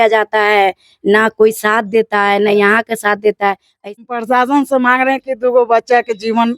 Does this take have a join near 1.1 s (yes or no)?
no